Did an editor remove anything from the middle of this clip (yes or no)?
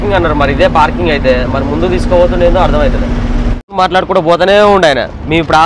yes